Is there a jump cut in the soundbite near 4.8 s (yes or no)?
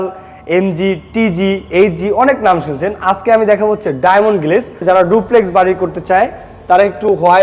yes